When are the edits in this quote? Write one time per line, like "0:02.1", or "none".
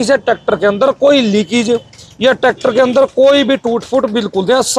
none